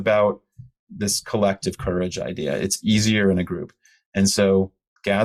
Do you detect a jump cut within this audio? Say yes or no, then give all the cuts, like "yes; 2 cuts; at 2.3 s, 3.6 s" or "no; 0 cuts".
no; 0 cuts